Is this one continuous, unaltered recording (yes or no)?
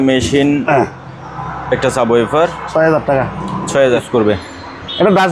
no